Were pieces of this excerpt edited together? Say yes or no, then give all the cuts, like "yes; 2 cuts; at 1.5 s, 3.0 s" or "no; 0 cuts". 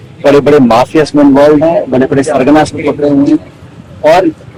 no; 0 cuts